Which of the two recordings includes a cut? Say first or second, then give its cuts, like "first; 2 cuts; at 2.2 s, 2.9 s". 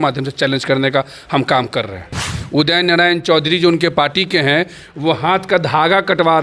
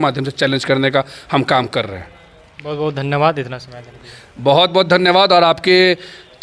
first; 1 cut; at 2.3 s